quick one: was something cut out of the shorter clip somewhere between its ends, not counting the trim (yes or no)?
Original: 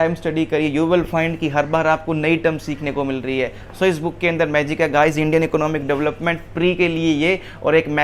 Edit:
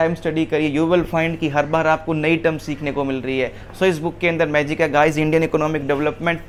no